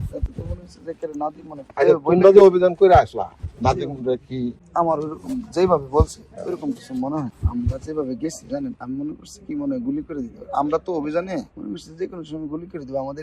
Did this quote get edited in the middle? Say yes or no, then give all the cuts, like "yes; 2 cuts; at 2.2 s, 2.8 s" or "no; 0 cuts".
yes; 2 cuts; at 4.6 s, 7.3 s